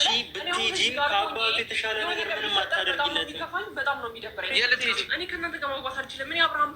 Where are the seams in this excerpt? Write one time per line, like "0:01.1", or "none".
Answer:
0:04.5